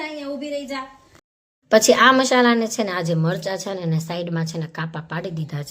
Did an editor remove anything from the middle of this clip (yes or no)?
yes